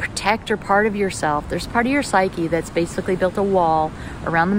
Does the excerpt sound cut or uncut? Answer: uncut